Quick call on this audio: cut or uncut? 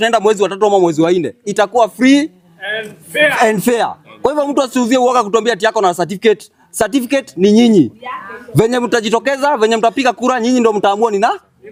uncut